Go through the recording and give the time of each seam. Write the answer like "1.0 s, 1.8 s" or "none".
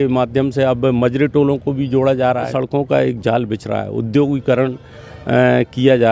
2.5 s

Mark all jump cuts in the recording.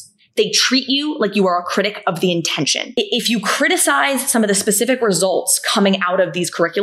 2.8 s

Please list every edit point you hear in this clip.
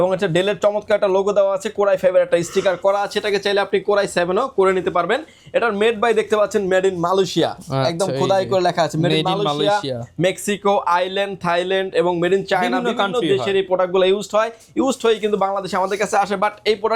none

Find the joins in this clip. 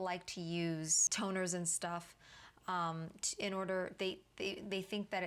1.0 s

